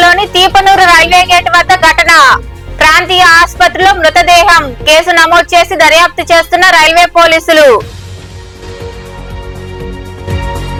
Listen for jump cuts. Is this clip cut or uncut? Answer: uncut